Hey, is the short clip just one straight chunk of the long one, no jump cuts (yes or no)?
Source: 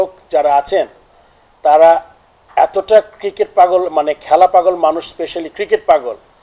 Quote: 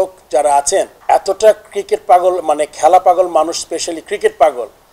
no